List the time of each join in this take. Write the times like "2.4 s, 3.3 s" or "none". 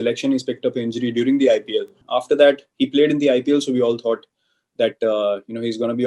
2.0 s

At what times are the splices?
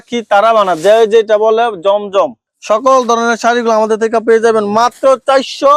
none

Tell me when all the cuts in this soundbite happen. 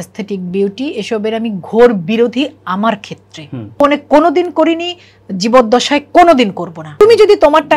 3.8 s, 6.8 s

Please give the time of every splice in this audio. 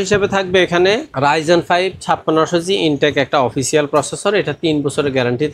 1.1 s

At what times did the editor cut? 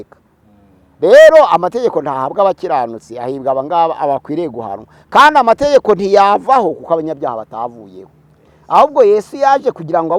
none

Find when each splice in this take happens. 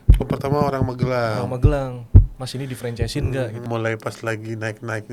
3.6 s

